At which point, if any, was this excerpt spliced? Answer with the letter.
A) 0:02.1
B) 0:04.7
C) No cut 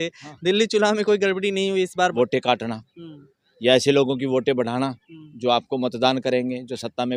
A